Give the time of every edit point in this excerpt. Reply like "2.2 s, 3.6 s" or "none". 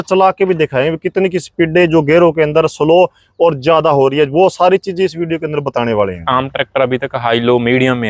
none